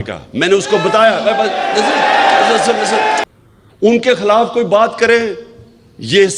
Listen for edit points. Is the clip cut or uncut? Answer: cut